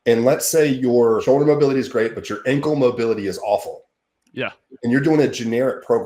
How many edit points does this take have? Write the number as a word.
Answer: one